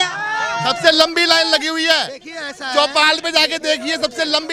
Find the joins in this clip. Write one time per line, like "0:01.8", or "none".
none